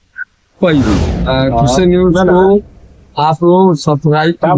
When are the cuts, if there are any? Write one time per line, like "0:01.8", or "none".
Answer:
0:01.2